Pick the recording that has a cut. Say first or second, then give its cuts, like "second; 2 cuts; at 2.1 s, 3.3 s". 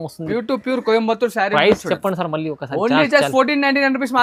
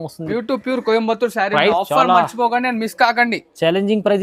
second; 1 cut; at 1.7 s